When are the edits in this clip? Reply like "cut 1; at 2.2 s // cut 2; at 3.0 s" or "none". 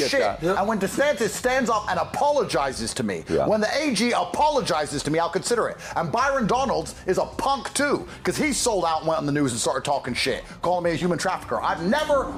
none